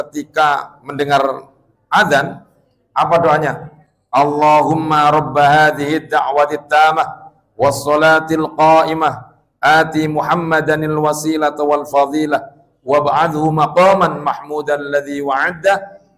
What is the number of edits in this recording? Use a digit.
0